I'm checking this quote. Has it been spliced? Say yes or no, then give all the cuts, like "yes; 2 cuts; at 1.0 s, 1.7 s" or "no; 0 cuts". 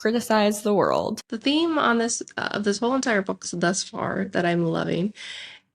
yes; 1 cut; at 1.1 s